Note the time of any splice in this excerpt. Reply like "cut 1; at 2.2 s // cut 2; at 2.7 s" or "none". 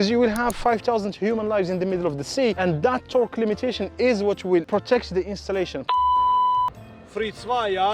cut 1; at 2.6 s // cut 2; at 4.7 s // cut 3; at 5.8 s